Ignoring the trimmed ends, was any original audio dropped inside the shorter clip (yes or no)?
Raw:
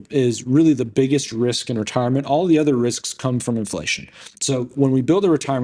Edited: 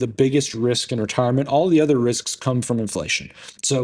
no